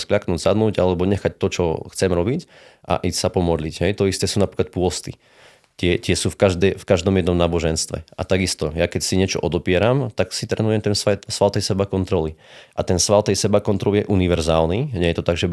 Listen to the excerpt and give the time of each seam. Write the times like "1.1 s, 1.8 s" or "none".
none

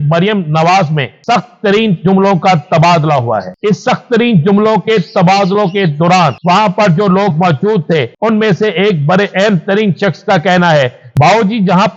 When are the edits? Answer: 1.1 s, 3.5 s, 6.4 s, 8.1 s, 11.0 s

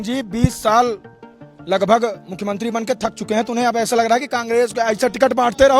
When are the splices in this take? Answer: none

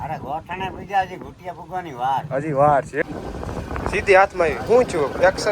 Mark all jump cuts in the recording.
3.0 s

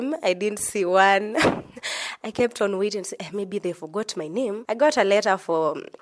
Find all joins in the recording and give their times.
4.6 s

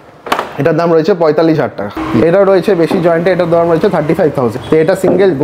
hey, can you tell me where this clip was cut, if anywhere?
1.8 s, 4.5 s

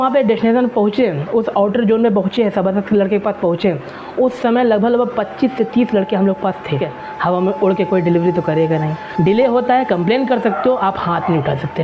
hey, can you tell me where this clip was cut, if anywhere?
7.0 s, 9.1 s

